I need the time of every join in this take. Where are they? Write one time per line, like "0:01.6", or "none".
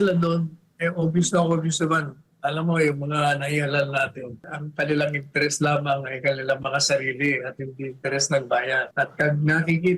0:04.6
0:08.9